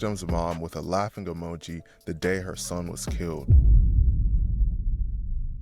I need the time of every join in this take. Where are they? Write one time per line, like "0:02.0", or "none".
none